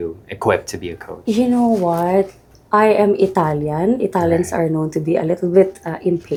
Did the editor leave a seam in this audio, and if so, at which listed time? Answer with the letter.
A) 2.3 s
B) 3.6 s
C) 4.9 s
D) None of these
D